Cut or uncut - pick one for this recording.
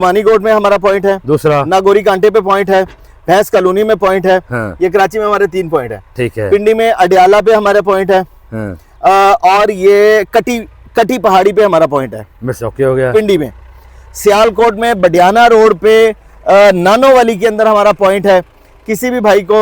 uncut